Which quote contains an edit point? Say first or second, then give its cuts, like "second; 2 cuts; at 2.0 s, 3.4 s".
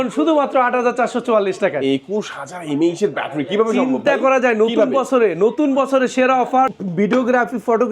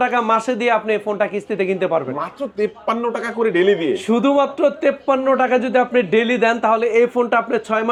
first; 1 cut; at 6.8 s